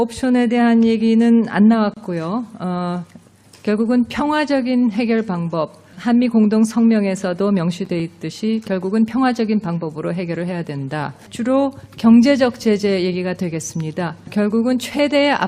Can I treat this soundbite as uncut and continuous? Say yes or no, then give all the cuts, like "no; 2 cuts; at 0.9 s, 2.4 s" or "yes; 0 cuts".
no; 1 cut; at 7.2 s